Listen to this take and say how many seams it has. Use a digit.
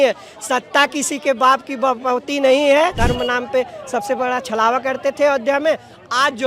1